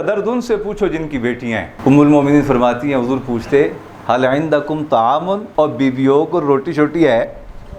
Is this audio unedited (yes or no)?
no